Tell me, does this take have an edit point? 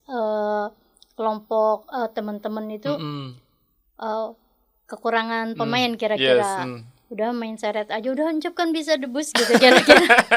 no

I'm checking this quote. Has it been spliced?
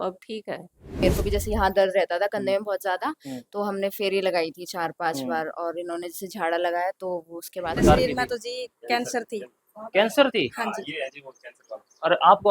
yes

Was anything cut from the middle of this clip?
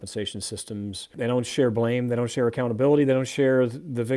yes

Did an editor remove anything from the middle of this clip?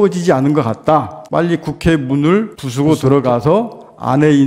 yes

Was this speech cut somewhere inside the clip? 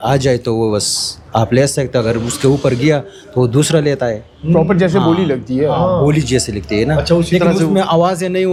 no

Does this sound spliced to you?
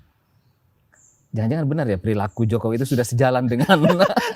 no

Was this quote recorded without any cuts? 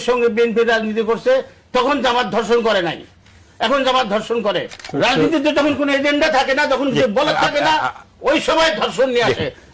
no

